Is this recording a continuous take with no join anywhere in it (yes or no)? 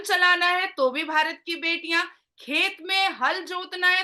yes